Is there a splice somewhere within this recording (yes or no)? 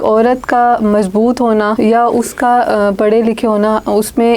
yes